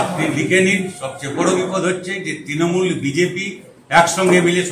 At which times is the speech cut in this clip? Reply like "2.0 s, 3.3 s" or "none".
none